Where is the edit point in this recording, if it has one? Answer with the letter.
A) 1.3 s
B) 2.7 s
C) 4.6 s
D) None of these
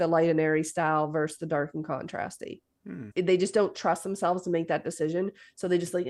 D